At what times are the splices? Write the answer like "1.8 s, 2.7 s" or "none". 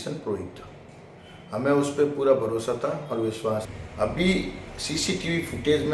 3.8 s